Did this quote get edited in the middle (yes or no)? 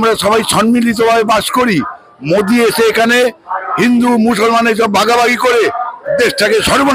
no